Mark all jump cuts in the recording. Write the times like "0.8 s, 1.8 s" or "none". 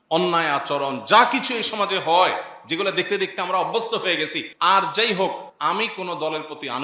4.4 s, 5.5 s